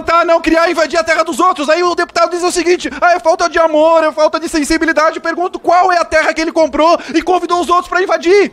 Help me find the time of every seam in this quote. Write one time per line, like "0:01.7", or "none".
none